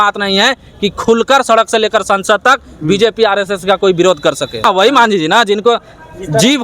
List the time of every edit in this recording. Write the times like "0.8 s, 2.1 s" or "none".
4.6 s